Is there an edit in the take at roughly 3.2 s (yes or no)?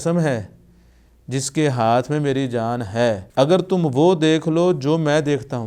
yes